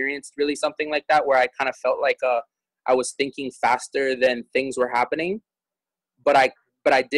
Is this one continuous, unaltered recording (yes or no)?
yes